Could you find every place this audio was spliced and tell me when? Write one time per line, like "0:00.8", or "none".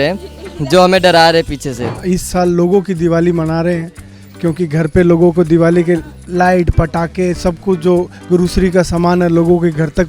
0:02.0